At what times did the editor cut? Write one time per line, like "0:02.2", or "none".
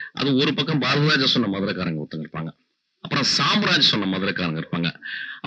none